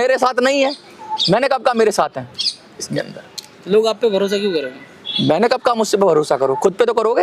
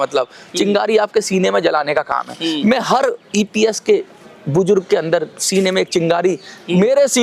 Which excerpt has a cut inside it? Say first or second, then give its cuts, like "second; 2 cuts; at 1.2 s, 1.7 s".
first; 1 cut; at 2.9 s